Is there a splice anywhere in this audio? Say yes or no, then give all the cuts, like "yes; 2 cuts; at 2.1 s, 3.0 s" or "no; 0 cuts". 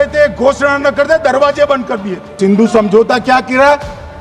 yes; 1 cut; at 2.3 s